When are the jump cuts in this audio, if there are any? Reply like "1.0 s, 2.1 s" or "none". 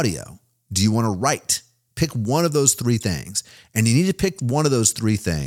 none